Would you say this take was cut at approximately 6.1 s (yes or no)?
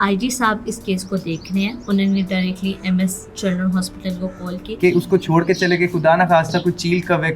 no